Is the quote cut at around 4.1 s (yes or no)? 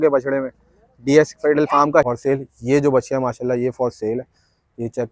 no